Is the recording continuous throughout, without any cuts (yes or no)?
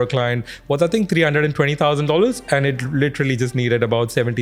yes